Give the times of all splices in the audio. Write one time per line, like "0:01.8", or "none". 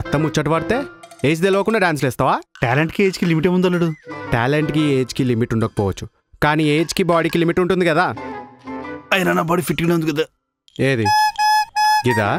none